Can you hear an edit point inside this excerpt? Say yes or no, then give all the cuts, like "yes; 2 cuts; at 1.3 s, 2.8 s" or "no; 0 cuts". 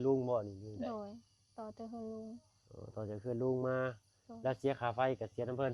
no; 0 cuts